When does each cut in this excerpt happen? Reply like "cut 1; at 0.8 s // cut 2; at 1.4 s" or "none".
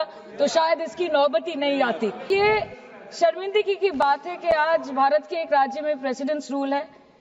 cut 1; at 2.3 s